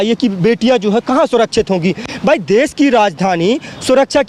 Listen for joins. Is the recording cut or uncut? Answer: uncut